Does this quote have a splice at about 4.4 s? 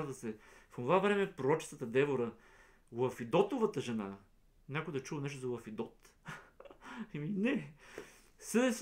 no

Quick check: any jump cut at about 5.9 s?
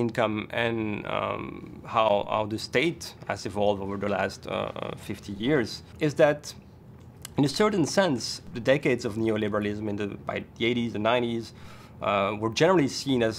yes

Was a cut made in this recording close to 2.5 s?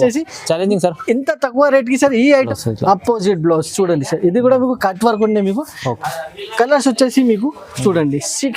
yes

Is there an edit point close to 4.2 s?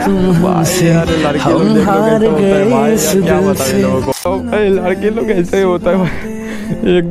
yes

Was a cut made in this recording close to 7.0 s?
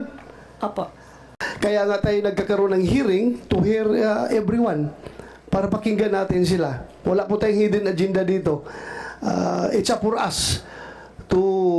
no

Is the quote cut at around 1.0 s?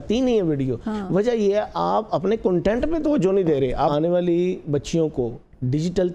no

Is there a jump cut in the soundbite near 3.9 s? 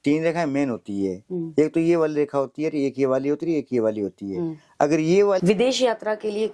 no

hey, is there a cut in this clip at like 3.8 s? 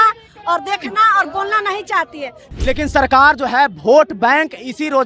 no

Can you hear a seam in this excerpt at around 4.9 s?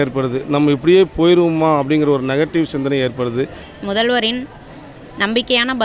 no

